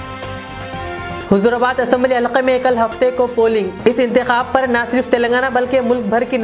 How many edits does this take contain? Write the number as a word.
one